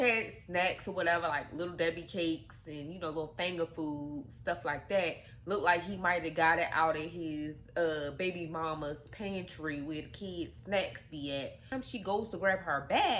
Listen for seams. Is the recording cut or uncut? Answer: cut